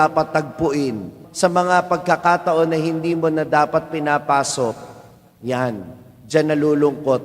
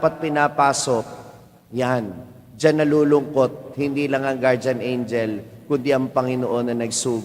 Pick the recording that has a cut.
first; 1 cut; at 1.2 s

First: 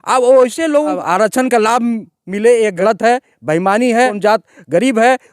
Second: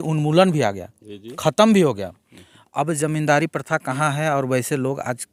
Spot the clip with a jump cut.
first; 3 cuts; at 1.0 s, 2.8 s, 4.2 s

